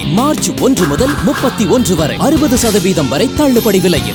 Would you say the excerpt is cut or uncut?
uncut